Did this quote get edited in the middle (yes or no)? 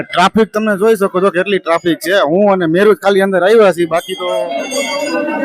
yes